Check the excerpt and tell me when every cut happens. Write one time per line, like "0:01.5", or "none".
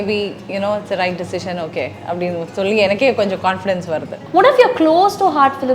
0:04.2